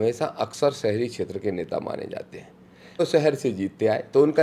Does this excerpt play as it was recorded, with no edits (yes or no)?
no